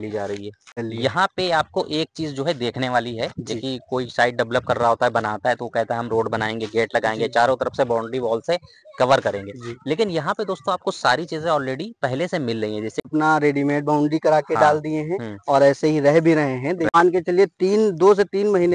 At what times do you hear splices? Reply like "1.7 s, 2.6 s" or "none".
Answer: 0.8 s, 13.1 s, 17.0 s